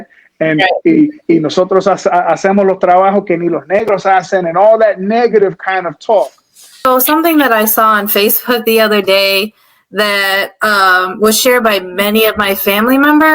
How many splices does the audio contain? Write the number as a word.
one